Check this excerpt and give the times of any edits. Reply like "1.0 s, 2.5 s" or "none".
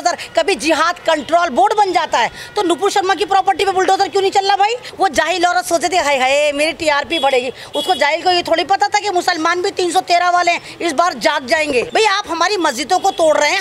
4.8 s, 11.9 s